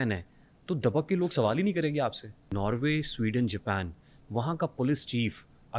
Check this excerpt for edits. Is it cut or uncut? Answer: cut